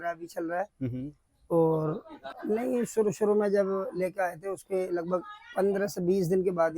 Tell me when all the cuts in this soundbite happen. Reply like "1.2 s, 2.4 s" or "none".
2.2 s